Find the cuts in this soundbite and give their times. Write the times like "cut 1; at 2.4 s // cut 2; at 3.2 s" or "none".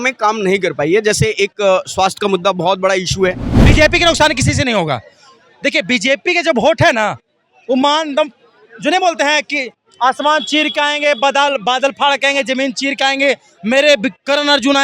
cut 1; at 3.5 s